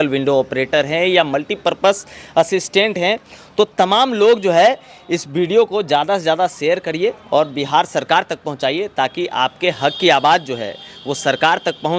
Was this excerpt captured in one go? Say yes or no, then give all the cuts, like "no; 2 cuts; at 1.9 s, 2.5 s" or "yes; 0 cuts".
yes; 0 cuts